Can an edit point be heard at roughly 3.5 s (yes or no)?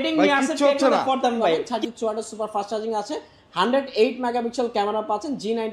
no